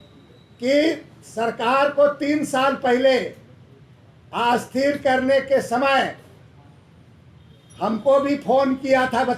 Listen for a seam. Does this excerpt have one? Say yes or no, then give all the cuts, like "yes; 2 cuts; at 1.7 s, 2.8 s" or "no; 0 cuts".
no; 0 cuts